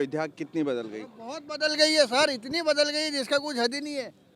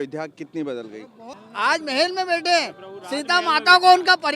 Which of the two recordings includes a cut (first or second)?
second